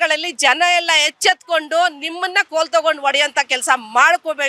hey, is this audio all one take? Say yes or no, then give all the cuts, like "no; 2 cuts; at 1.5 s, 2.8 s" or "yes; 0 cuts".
yes; 0 cuts